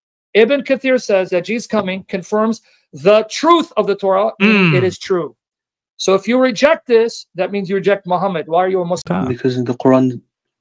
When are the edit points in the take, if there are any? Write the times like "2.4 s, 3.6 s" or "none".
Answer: 9.1 s